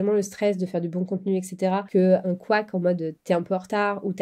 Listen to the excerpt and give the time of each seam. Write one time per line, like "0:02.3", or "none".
none